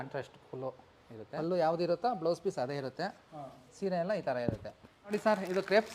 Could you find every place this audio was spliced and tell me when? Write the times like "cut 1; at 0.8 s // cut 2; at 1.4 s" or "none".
cut 1; at 1.3 s // cut 2; at 5.1 s